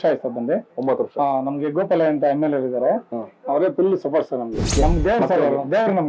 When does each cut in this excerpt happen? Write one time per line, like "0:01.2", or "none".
0:04.7